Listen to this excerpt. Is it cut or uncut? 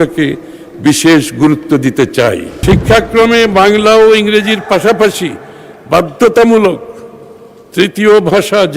cut